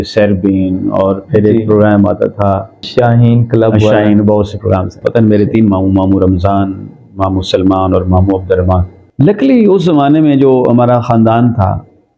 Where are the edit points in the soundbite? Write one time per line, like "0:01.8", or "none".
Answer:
0:05.0
0:09.0